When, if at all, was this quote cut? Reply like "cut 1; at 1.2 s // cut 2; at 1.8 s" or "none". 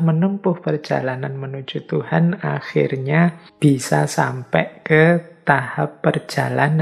cut 1; at 3.5 s